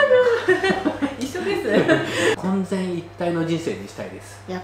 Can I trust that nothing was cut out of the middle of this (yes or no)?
no